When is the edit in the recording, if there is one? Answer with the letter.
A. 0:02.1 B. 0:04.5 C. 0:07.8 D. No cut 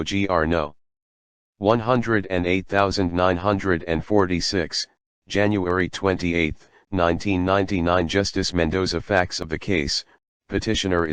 A